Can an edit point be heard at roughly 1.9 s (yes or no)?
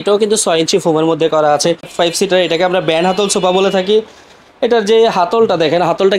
yes